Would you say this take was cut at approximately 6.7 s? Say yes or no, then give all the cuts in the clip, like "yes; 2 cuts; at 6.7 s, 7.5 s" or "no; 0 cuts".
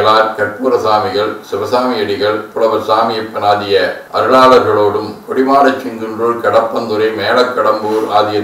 no; 1 cut; at 2.5 s